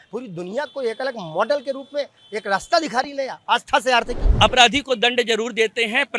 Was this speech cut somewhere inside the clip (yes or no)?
yes